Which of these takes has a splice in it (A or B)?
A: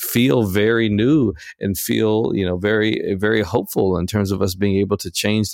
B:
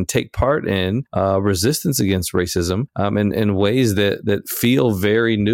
B